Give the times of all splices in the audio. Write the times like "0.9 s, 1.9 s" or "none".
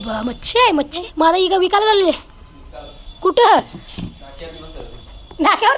1.0 s